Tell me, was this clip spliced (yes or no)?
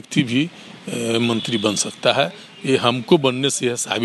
no